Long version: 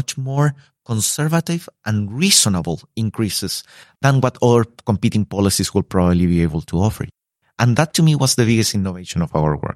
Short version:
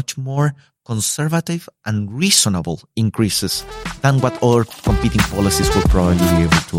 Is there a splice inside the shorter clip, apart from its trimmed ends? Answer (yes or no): no